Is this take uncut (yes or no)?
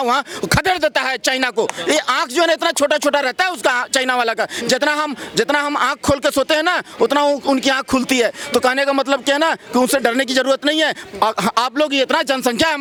yes